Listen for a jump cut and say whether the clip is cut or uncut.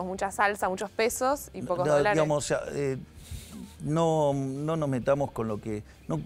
uncut